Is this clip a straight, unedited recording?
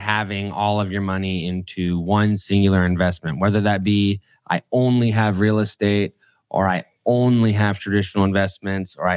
yes; 0 cuts

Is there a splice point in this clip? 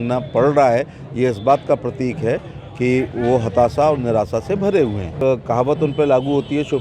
yes; 1 cut; at 5.2 s

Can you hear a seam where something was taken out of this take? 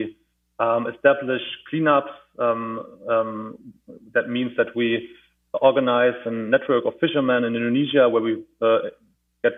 no; 0 cuts

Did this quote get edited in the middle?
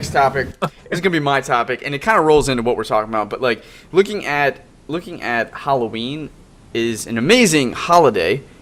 no; 0 cuts

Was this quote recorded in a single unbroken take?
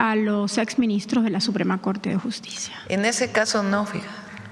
yes; 0 cuts

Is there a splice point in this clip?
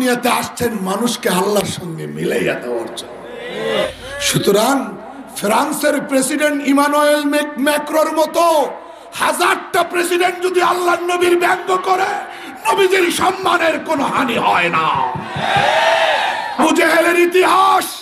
yes; 2 cuts; at 3.9 s, 16.6 s

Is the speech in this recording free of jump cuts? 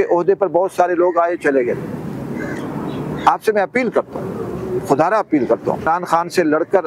no; 1 cut; at 5.8 s

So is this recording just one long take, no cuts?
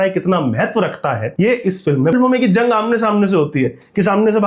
no; 2 cuts; at 1.3 s, 2.1 s

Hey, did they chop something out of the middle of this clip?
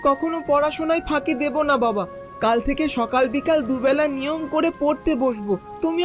no; 0 cuts

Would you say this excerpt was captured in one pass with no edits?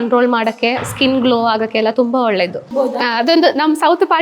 no; 1 cut; at 2.7 s

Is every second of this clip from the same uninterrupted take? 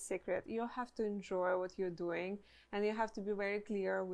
yes; 0 cuts

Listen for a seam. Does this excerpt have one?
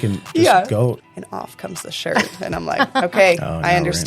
yes; 1 cut; at 1.0 s

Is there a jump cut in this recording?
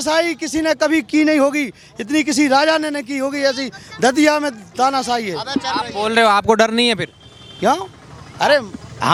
no; 0 cuts

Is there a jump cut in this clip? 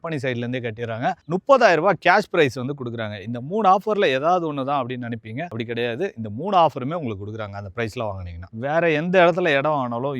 yes; 1 cut; at 8.5 s

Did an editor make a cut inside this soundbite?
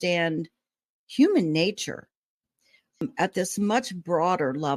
yes; 1 cut; at 3.0 s

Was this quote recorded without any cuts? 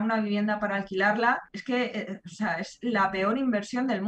yes; 0 cuts

